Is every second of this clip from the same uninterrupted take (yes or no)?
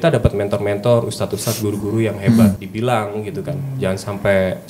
no